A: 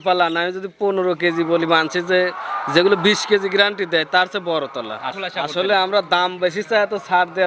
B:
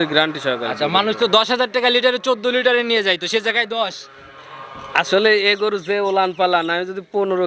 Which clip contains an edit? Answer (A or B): A